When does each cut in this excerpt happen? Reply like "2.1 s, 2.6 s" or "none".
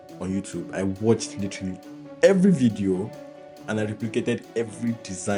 none